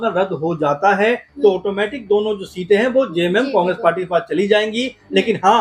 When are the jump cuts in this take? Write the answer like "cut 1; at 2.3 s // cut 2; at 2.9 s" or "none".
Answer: none